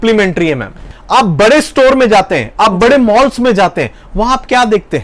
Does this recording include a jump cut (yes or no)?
yes